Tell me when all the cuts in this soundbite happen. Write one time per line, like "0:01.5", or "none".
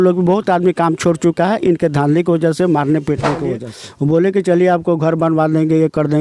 0:03.7